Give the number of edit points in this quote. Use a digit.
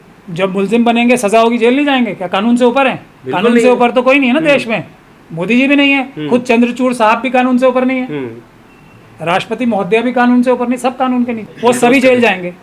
1